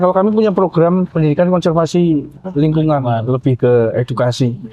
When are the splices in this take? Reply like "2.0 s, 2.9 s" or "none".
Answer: 1.1 s